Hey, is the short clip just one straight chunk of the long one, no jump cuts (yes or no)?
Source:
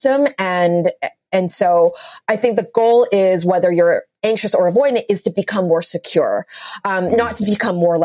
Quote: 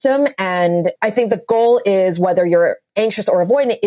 no